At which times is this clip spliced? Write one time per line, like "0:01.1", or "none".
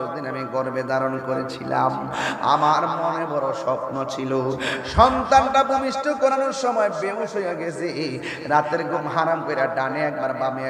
none